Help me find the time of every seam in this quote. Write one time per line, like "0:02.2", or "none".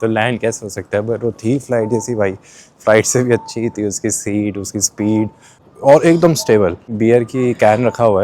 0:05.6
0:06.9